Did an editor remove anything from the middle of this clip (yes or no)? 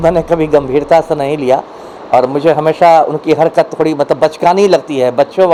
no